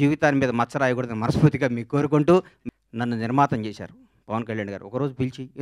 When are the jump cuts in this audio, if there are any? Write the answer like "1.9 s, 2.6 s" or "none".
2.5 s